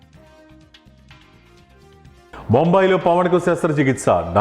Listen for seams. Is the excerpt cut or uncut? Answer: uncut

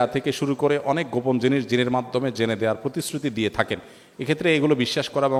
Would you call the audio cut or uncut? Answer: uncut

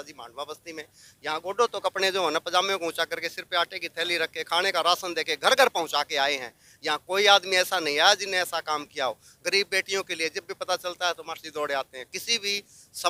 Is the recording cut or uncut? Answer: uncut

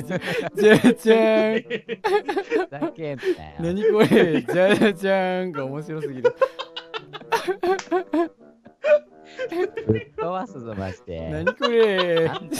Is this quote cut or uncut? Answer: uncut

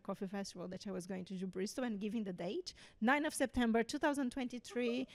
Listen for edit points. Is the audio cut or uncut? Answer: uncut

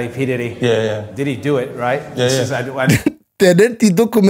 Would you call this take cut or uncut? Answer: uncut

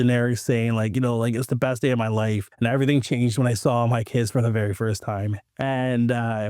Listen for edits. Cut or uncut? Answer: cut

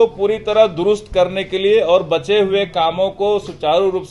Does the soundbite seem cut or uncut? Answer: uncut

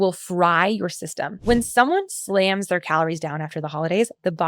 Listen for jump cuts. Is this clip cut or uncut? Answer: cut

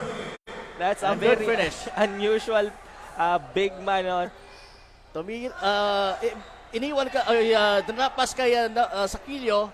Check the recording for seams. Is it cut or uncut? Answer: uncut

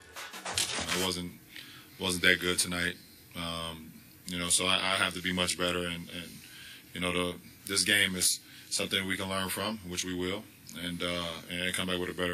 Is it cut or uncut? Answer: uncut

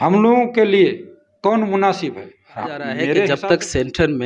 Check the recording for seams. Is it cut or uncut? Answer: cut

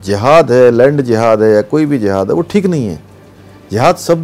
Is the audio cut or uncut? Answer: uncut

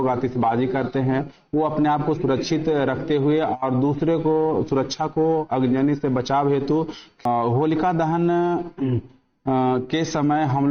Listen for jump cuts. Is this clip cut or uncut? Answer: cut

